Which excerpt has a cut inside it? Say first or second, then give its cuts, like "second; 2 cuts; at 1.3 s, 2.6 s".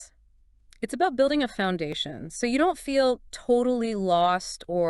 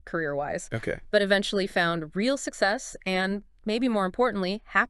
first; 1 cut; at 3.1 s